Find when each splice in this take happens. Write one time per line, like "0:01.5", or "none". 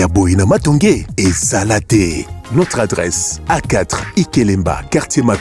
none